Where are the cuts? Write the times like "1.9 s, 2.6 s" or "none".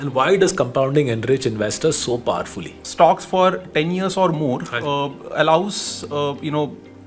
2.8 s